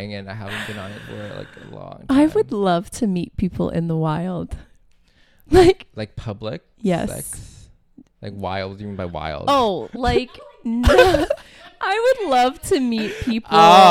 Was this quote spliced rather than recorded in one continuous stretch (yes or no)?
no